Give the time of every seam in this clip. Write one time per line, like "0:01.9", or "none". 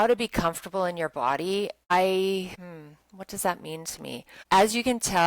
0:01.9
0:02.6
0:04.3